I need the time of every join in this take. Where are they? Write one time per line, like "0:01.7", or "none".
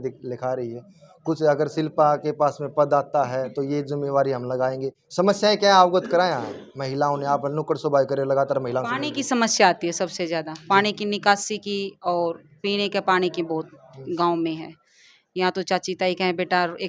none